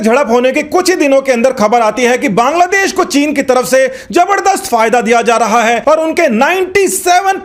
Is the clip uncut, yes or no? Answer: yes